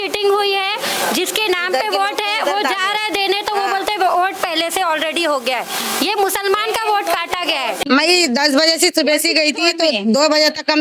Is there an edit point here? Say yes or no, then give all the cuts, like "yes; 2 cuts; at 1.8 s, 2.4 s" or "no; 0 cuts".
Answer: yes; 1 cut; at 7.8 s